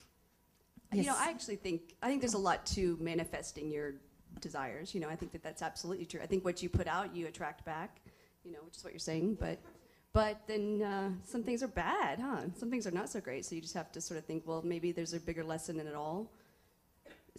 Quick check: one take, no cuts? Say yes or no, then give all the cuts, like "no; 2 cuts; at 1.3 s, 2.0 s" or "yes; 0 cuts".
no; 1 cut; at 5.1 s